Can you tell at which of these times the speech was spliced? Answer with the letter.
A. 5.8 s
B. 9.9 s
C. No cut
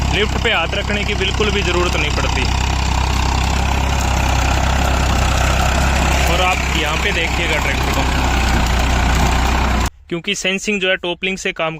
B